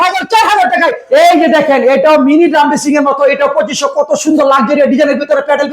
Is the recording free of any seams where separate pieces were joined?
no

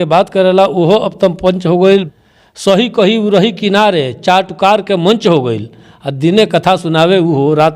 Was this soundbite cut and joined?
yes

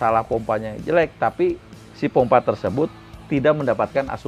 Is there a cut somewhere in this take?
no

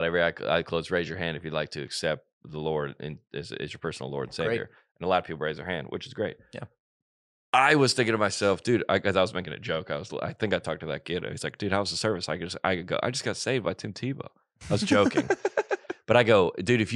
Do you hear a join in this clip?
no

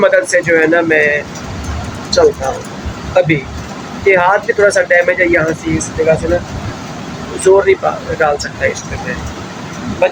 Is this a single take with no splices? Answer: yes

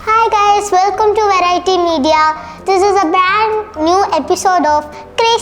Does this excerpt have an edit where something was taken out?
no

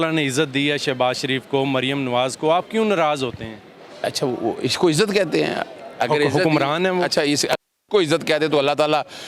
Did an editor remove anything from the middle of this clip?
no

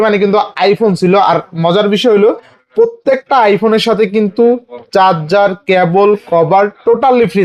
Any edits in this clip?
no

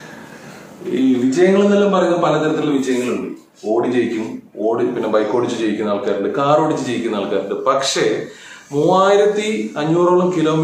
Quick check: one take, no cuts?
yes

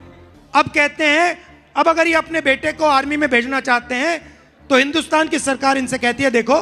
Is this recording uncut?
yes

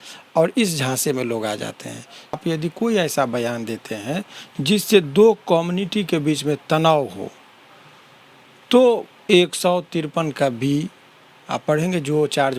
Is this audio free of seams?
no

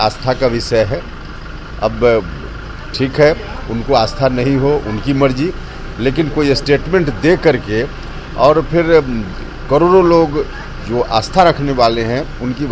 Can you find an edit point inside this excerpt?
no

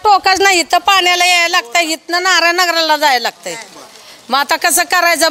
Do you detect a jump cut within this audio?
no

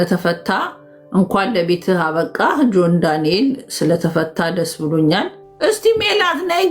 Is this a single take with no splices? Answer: no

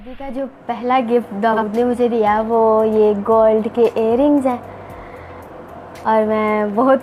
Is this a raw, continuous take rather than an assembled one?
yes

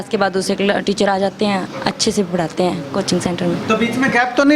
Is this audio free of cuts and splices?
yes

